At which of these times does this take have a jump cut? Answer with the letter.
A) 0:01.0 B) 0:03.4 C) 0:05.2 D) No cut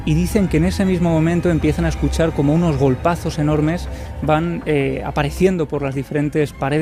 D